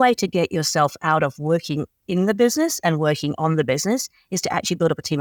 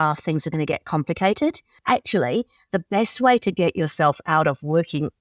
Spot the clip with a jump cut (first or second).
second